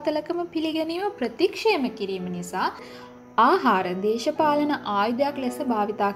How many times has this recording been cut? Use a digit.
1